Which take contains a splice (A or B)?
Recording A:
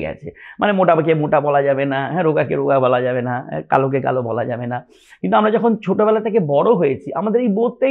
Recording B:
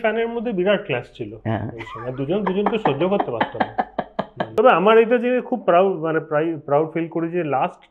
B